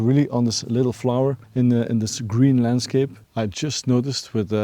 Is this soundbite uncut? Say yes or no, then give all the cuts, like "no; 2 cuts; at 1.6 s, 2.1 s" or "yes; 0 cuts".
yes; 0 cuts